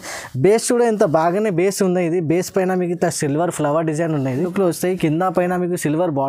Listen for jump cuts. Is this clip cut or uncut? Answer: cut